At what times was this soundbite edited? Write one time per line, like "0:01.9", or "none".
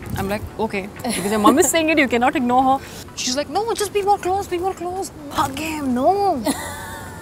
0:03.0
0:05.3